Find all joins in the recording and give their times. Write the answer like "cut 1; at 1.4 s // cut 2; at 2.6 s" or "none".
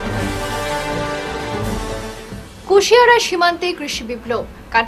none